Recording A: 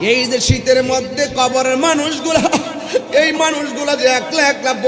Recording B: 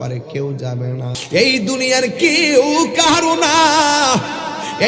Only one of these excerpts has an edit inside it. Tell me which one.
B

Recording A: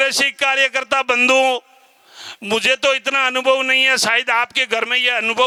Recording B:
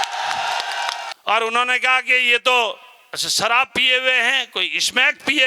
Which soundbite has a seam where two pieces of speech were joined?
B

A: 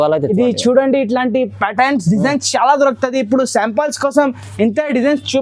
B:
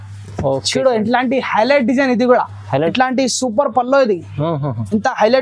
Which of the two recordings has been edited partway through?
B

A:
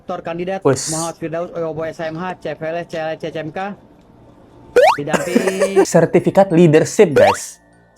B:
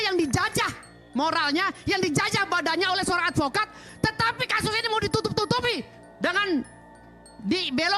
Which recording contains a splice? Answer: A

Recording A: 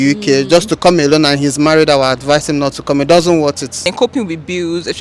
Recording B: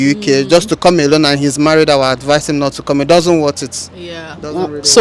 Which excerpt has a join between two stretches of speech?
A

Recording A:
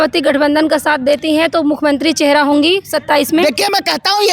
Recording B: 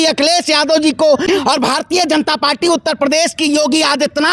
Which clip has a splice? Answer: B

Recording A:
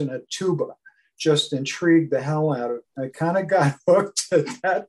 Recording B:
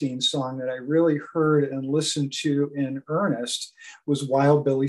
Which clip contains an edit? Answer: A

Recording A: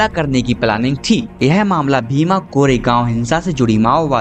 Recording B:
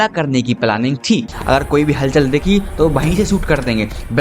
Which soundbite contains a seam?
B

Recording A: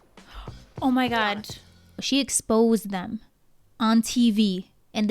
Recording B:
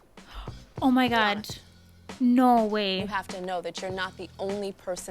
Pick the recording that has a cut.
A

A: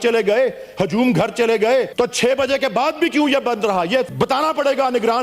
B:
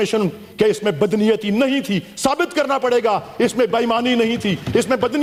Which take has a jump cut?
A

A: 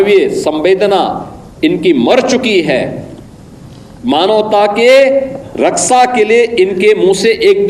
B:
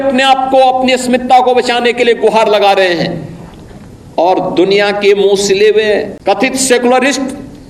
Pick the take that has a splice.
B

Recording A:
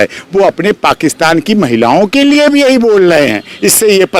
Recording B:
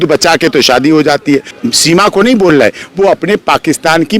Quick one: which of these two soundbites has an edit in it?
B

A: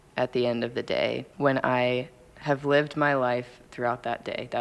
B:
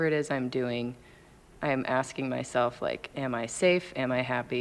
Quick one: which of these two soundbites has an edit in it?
A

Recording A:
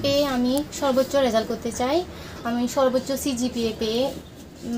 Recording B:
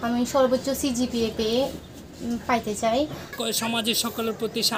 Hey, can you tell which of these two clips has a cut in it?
B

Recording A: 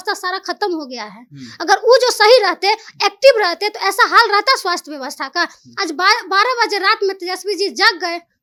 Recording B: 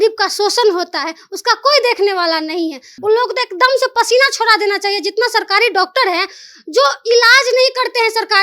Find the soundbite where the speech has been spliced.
B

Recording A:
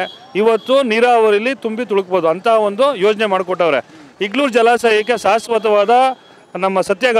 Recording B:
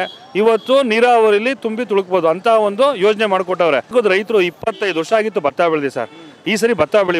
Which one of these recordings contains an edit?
B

